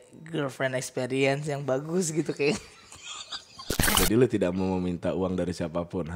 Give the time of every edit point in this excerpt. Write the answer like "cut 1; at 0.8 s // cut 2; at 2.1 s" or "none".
cut 1; at 3.8 s

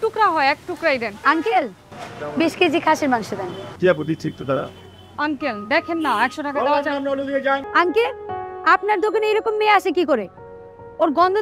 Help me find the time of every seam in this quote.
cut 1; at 1.1 s // cut 2; at 7.7 s

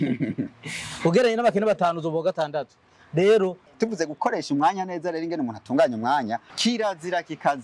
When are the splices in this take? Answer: cut 1; at 3.7 s // cut 2; at 6.5 s

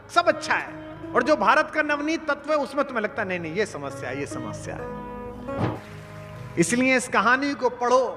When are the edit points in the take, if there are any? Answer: cut 1; at 5.8 s

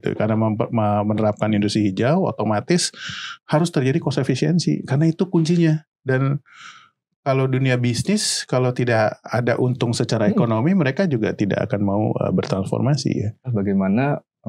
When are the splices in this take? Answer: cut 1; at 13.5 s

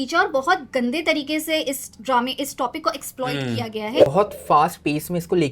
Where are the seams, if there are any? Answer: cut 1; at 4.0 s

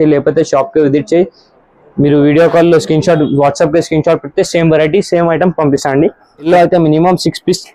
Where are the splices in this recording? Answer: cut 1; at 6.5 s

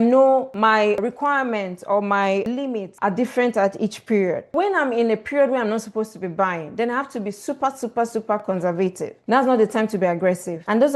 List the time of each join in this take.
cut 1; at 4.5 s

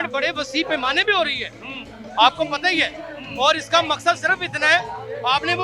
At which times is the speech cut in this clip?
none

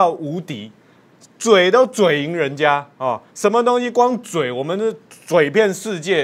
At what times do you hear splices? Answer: none

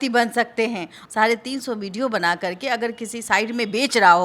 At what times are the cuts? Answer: cut 1; at 1.0 s

